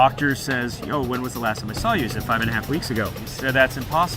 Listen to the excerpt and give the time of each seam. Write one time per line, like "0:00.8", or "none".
0:03.2